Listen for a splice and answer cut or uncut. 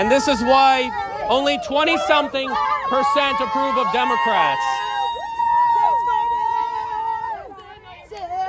uncut